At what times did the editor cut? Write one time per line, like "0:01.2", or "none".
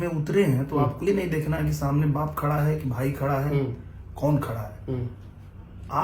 0:01.0